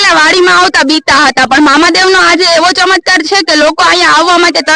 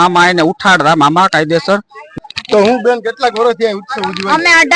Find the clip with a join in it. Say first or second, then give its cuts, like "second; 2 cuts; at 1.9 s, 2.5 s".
second; 1 cut; at 2.2 s